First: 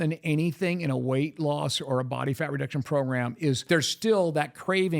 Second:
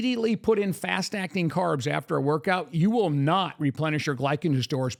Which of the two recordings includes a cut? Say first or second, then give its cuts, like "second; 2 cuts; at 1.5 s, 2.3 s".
first; 1 cut; at 3.7 s